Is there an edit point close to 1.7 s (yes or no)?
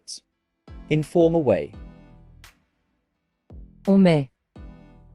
no